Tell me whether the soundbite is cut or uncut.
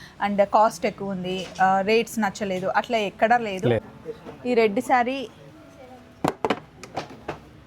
cut